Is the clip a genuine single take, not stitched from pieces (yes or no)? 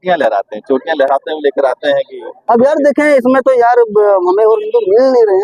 yes